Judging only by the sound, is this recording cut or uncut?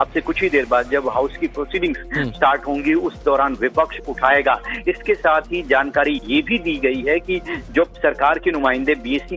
cut